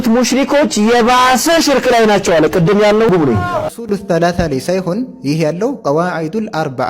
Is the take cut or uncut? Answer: cut